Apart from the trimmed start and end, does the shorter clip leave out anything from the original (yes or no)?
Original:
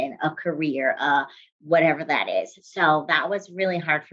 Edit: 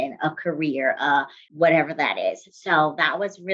yes